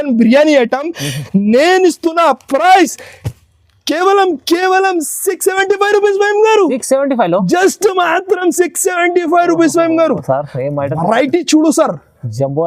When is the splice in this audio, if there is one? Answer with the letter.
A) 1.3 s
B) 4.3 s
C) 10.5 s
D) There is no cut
D